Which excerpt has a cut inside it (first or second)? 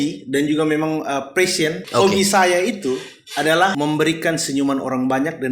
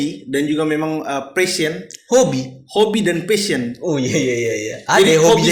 first